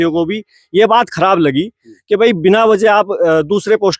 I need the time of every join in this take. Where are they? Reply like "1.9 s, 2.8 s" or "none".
none